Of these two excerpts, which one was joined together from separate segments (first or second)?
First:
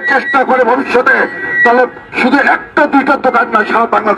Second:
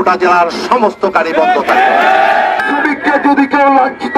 second